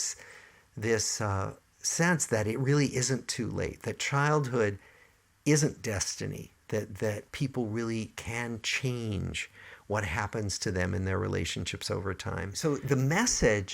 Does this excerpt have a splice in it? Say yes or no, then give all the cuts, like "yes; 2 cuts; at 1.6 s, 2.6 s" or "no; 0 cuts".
yes; 1 cut; at 12.5 s